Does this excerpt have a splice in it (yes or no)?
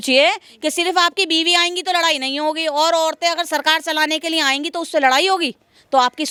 no